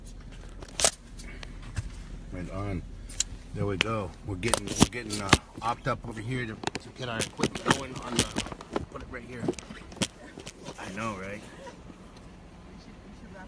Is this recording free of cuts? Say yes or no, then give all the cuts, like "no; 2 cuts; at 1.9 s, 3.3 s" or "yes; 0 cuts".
yes; 0 cuts